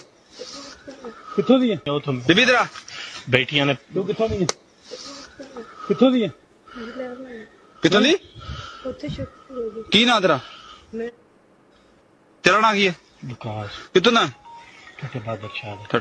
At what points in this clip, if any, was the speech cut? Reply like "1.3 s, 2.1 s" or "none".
1.7 s